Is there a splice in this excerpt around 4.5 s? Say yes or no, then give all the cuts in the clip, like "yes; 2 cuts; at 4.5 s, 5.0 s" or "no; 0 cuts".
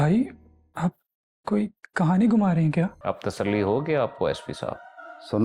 no; 1 cut; at 3.0 s